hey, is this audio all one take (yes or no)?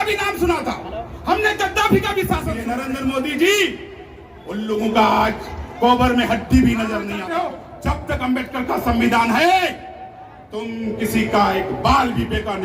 no